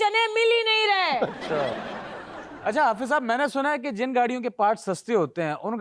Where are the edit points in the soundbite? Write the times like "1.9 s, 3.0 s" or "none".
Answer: 2.2 s